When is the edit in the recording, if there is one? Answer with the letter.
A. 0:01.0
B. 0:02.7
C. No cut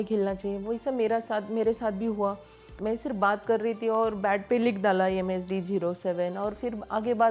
B